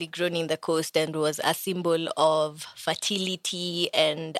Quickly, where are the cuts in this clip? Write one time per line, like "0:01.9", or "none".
none